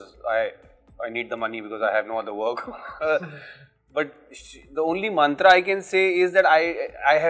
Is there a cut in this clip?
no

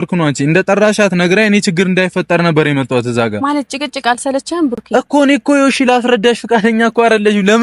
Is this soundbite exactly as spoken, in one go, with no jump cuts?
yes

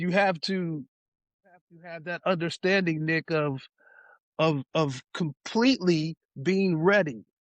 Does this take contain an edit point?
no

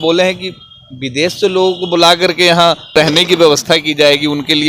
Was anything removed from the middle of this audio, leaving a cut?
yes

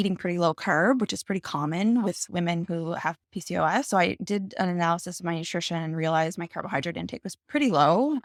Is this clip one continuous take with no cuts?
yes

